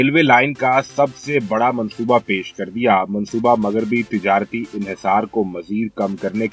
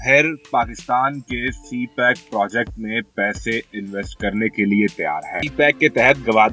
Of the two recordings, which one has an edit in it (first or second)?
second